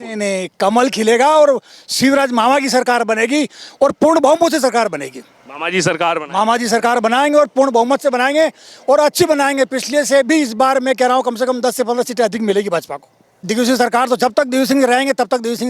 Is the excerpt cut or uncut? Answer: cut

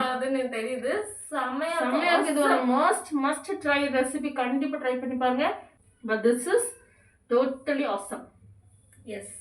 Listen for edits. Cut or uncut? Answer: cut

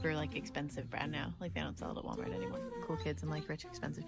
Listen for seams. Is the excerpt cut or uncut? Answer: cut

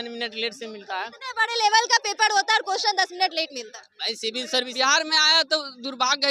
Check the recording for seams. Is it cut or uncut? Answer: cut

